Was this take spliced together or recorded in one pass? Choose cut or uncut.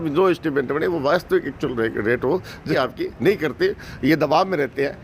cut